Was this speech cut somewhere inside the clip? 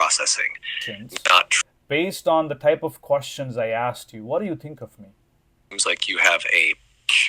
yes; 2 cuts; at 1.6 s, 5.6 s

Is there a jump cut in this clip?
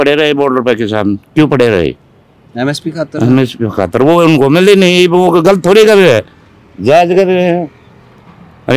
no; 0 cuts

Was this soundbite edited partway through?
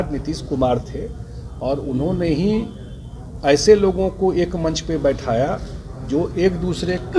no; 0 cuts

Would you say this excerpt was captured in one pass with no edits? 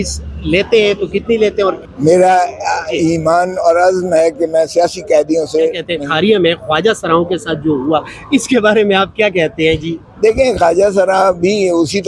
no; 2 cuts; at 1.8 s, 5.9 s

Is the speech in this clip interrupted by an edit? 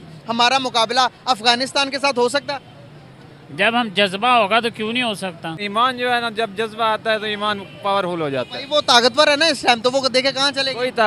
yes; 1 cut; at 5.6 s

